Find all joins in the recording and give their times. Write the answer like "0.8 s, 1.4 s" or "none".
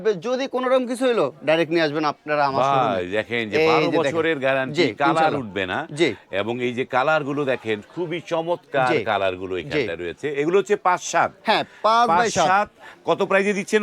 none